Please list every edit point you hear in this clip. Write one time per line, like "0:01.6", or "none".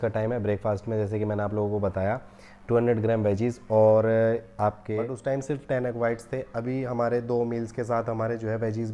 0:05.1